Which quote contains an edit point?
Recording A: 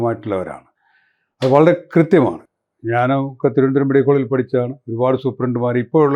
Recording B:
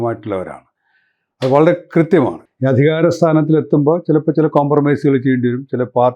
B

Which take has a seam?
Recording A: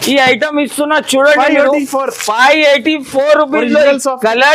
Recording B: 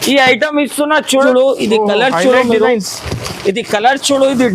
B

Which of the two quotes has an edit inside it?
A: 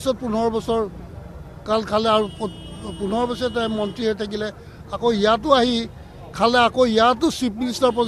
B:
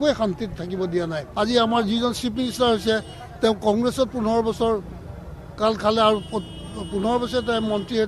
B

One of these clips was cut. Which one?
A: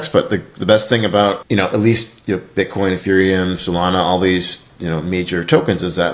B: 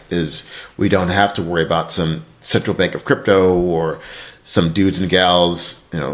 A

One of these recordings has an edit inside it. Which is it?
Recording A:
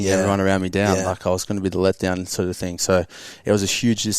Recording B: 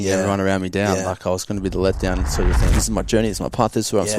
B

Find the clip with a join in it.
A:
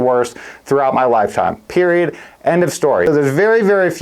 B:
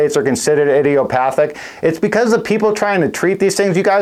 A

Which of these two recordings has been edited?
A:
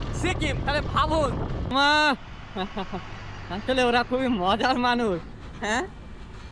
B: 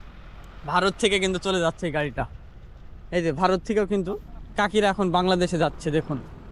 A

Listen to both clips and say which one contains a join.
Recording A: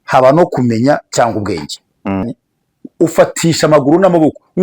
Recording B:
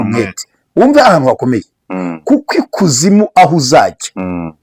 A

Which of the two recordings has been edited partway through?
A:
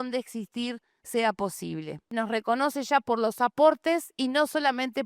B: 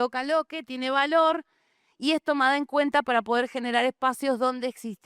A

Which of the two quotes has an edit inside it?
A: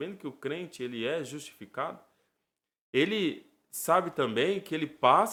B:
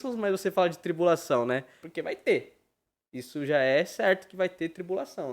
B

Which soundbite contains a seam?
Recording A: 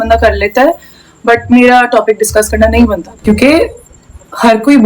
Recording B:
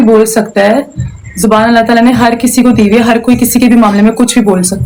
A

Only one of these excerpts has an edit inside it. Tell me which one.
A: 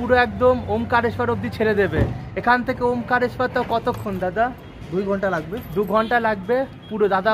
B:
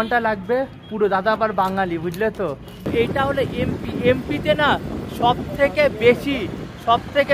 B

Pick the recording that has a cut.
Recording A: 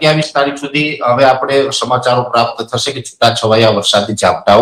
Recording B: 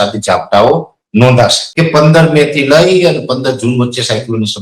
B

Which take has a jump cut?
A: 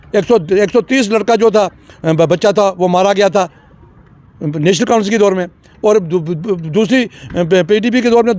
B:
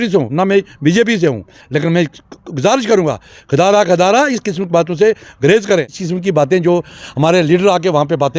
B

